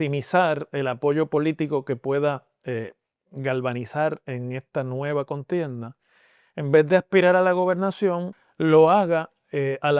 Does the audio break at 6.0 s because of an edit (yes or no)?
no